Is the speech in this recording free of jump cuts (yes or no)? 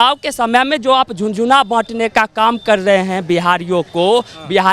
yes